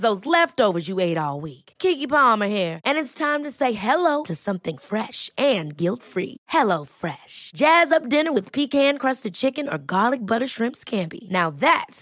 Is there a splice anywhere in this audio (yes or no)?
no